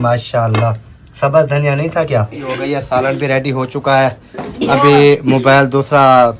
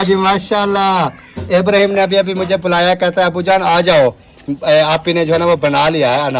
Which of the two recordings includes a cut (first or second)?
first